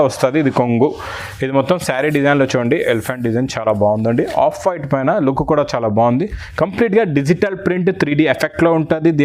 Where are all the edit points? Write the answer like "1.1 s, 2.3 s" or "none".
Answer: none